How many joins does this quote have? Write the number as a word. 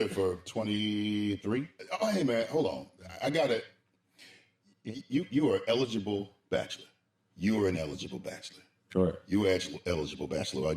one